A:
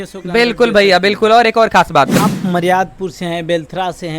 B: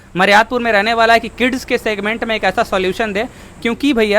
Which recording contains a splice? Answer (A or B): A